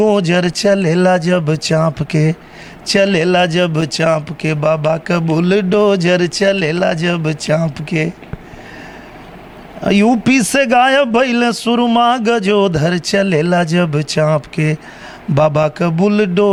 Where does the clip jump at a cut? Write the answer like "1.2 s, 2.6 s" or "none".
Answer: none

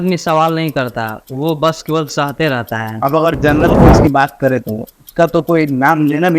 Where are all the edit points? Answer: 2.9 s

